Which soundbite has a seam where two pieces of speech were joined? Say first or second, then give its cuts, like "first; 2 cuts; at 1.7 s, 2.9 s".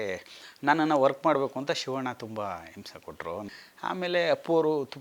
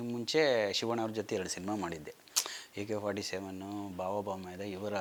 first; 1 cut; at 3.5 s